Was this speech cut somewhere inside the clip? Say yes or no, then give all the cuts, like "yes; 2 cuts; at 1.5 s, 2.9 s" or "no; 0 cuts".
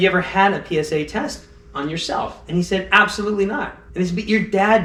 no; 0 cuts